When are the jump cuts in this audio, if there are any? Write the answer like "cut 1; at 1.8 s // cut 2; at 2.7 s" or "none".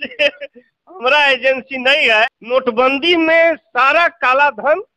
cut 1; at 2.4 s